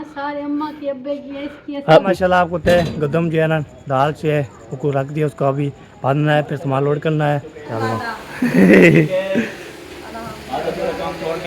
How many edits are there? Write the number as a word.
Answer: two